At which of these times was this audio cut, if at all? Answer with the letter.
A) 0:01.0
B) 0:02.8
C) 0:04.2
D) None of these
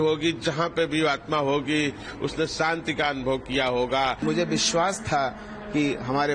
C